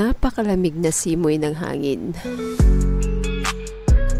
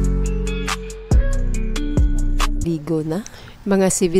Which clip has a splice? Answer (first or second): second